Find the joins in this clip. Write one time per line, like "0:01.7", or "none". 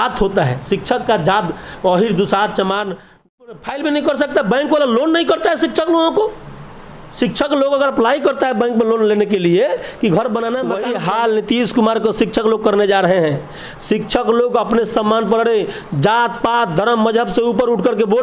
0:03.4
0:10.8